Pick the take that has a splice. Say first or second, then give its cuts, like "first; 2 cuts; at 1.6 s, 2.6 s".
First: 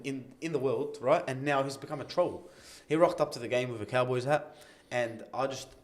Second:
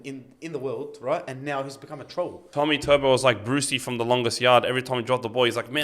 second; 1 cut; at 2.4 s